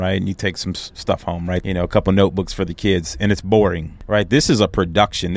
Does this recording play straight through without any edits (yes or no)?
no